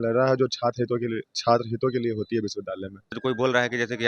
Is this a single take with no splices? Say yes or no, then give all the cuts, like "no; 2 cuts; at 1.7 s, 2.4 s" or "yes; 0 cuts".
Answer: no; 1 cut; at 3.2 s